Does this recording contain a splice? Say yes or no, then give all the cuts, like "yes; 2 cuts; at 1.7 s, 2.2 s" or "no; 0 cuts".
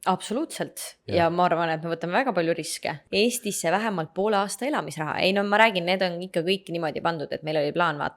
yes; 1 cut; at 3.0 s